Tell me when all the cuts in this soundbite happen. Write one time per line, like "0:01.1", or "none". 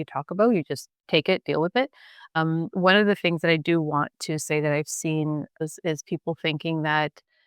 0:00.9
0:02.3
0:05.6